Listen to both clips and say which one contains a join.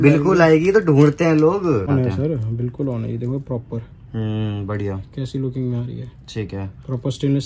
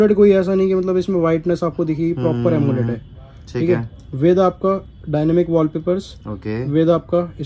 first; 1 cut; at 1.9 s

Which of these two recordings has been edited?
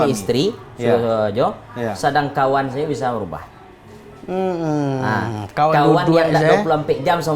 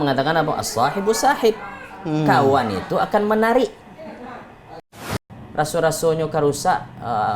second; 1 cut; at 5.0 s

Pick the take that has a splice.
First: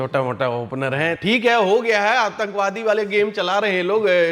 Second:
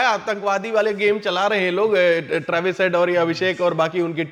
first; 1 cut; at 1.2 s

